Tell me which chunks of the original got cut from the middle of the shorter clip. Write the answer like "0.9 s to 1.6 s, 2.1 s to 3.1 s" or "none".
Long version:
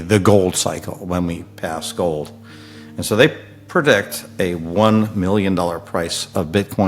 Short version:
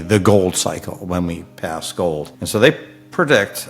2.4 s to 2.9 s